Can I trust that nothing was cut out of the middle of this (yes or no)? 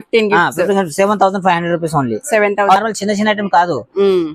no